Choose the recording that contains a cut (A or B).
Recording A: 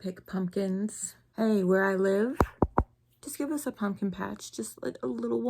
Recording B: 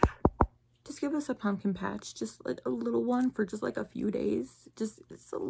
A